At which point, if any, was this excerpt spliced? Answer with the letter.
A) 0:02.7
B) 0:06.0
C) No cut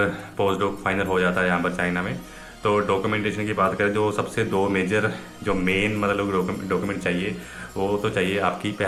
C